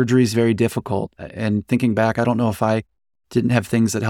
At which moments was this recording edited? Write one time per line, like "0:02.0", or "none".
none